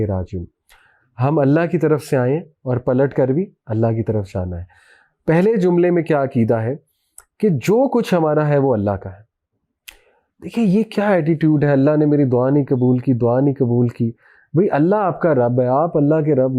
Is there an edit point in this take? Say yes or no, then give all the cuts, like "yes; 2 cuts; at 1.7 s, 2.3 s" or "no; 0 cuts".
no; 0 cuts